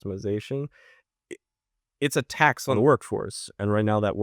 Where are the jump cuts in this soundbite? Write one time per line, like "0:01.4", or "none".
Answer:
0:02.8